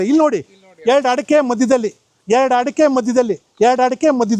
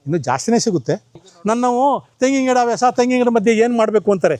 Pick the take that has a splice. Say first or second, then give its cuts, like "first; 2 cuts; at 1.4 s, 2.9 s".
second; 1 cut; at 1.3 s